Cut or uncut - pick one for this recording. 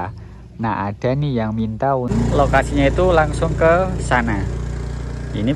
cut